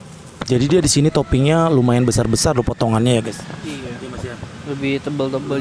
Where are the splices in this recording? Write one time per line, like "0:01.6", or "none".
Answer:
none